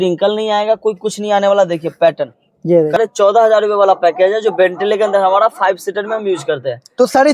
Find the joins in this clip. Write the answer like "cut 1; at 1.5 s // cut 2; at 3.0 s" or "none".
cut 1; at 3.0 s